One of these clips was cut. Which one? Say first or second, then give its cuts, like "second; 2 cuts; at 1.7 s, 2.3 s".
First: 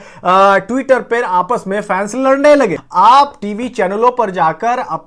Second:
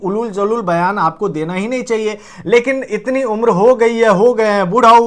first; 1 cut; at 2.8 s